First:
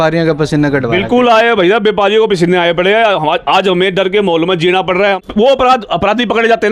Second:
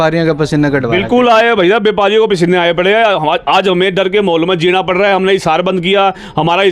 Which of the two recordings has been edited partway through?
first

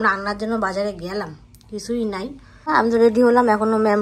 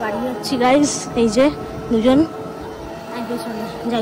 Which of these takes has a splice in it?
first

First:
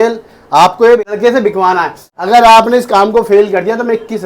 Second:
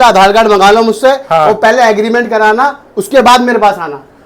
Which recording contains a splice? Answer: first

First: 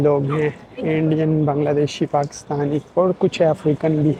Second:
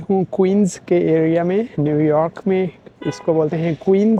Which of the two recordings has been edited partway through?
first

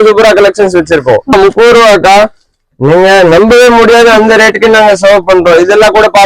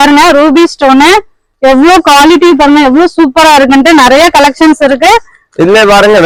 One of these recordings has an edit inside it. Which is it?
first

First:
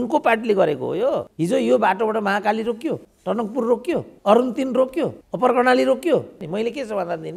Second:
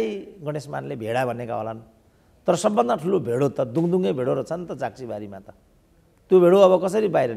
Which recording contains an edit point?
first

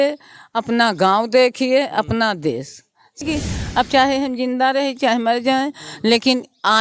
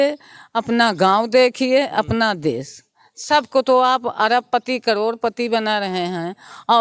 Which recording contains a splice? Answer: first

